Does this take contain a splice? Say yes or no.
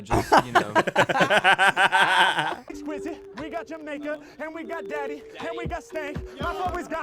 yes